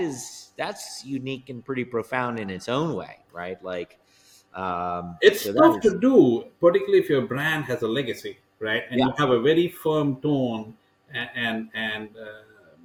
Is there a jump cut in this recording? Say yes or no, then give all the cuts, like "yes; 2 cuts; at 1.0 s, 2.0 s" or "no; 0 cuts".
no; 0 cuts